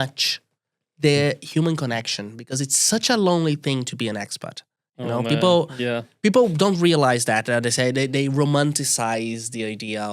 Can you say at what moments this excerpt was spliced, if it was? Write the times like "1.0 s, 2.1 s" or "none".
none